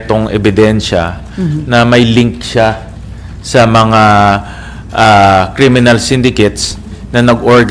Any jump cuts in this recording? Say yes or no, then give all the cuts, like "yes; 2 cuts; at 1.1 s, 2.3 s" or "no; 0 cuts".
no; 0 cuts